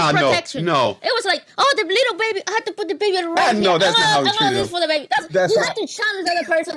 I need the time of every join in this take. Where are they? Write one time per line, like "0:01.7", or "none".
none